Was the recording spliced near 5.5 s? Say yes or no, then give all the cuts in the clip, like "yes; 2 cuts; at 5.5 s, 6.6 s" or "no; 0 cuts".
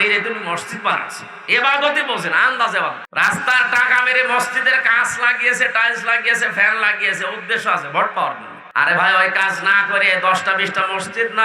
no; 2 cuts; at 3.0 s, 8.5 s